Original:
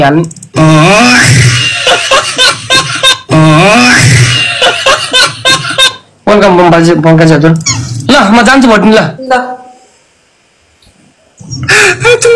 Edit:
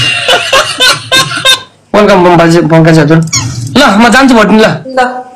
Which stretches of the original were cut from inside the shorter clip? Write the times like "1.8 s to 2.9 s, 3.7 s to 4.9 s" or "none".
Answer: 3.1 s to 5.8 s